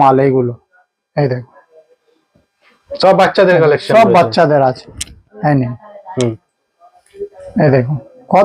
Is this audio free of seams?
yes; 0 cuts

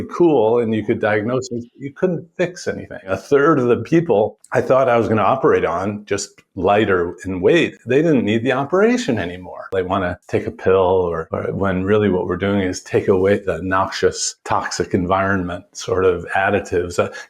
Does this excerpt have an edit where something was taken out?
yes; 6 cuts; at 3.2 s, 4.4 s, 10.0 s, 11.3 s, 13.5 s, 14.3 s

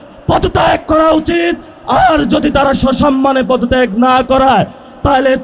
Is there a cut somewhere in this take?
no; 0 cuts

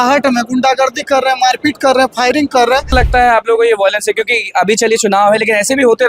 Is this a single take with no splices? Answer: no; 1 cut; at 2.9 s

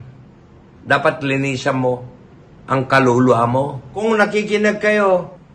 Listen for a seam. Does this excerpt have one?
yes; 1 cut; at 3.9 s

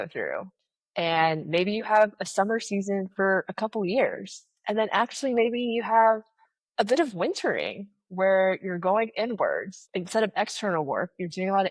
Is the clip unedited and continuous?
no; 1 cut; at 9.8 s

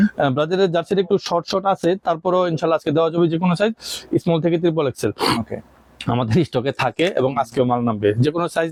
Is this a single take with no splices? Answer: yes; 0 cuts

